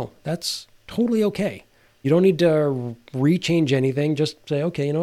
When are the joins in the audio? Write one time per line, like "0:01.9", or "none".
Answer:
0:02.0